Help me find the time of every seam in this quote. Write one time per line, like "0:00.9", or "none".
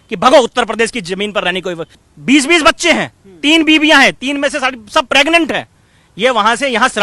0:02.0